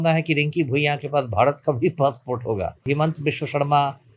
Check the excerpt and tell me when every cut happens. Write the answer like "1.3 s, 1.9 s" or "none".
2.9 s